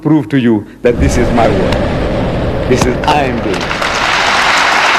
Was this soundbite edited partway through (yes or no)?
no